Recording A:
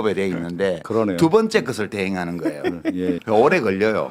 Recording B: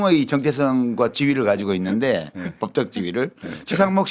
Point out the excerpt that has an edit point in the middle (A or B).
A